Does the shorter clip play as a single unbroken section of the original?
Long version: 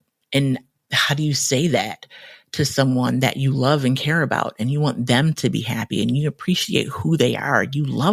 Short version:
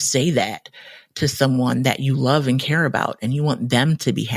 yes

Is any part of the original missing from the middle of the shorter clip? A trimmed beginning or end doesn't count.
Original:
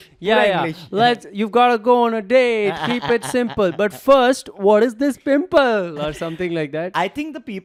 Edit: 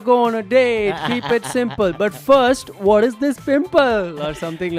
no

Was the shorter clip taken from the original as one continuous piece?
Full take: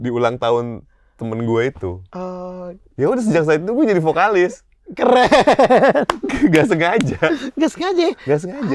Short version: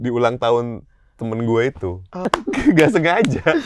no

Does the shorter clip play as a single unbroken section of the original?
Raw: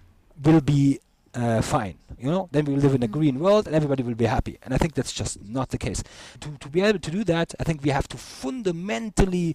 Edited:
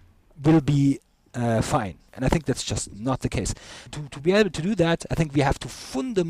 no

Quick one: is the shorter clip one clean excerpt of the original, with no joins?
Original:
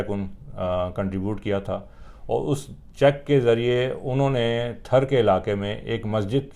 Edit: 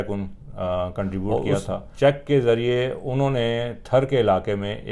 no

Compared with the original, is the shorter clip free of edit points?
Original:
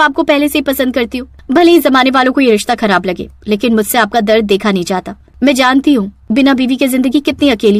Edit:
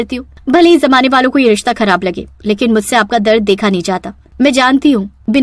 yes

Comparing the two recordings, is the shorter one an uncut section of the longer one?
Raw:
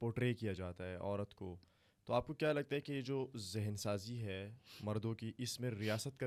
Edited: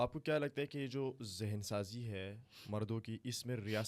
yes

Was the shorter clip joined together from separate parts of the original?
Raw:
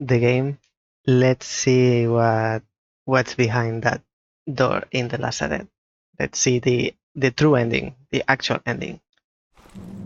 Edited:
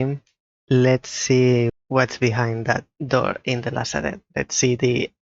yes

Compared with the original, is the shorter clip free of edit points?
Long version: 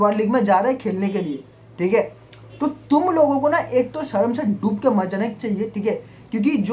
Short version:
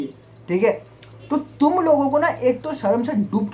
yes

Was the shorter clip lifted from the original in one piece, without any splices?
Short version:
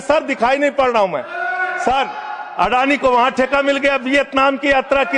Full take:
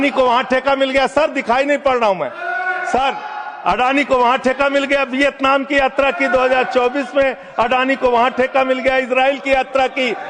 yes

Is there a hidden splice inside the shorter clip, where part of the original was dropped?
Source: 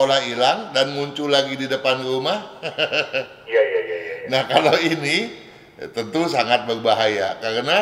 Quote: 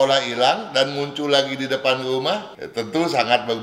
yes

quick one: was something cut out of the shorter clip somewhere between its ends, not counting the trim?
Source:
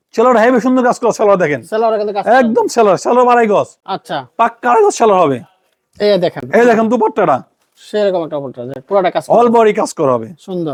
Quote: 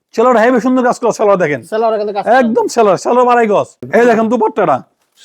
yes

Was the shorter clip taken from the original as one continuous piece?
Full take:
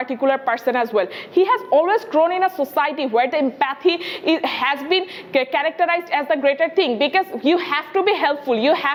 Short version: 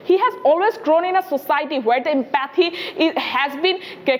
yes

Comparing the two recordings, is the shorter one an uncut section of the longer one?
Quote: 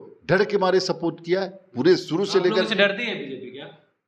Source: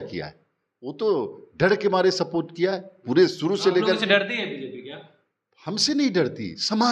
yes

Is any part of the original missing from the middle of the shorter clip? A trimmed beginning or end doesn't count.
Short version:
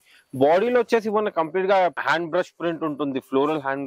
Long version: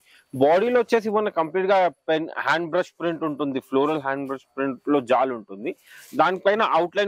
yes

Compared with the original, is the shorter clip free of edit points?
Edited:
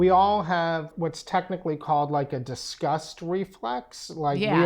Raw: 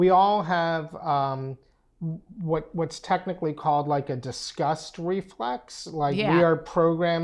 no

